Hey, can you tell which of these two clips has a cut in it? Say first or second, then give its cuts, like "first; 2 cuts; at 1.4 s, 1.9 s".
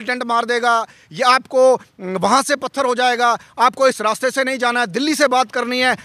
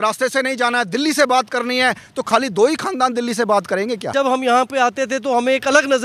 second; 1 cut; at 4.1 s